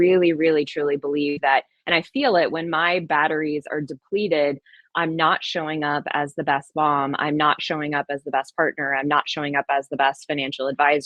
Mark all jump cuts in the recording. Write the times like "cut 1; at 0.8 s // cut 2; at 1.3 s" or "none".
none